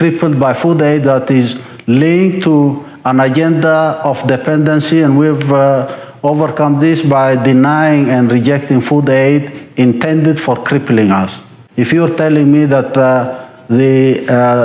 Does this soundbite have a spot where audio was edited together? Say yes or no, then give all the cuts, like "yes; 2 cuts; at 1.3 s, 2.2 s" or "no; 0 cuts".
yes; 1 cut; at 11.6 s